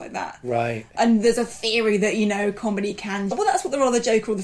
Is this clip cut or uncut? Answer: cut